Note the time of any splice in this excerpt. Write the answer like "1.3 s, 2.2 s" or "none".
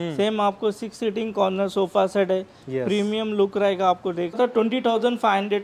4.4 s